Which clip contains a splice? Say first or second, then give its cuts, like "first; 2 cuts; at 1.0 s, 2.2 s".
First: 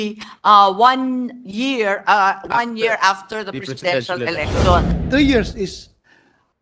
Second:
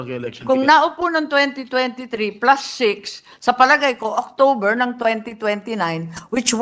first; 1 cut; at 5.0 s